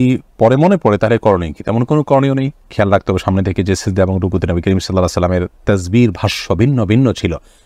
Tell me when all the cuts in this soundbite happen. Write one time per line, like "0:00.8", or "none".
none